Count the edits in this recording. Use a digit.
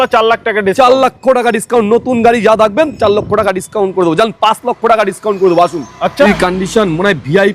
1